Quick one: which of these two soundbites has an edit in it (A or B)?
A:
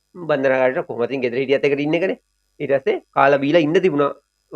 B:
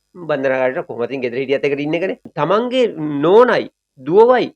B